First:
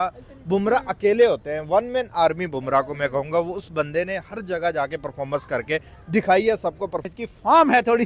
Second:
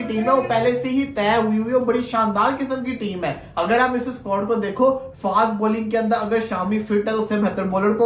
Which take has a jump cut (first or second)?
first